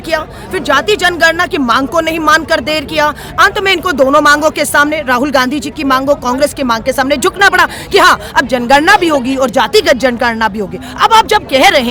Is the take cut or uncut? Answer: uncut